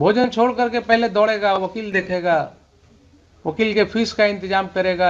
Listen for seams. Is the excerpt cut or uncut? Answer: uncut